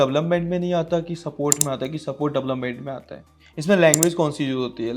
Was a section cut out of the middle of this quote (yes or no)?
yes